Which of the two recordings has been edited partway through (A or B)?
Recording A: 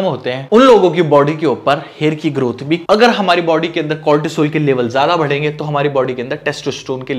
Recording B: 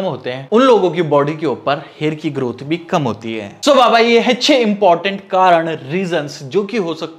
A